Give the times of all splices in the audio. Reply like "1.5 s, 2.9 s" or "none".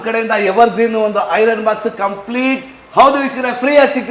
none